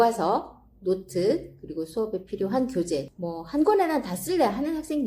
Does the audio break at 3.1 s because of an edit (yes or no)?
yes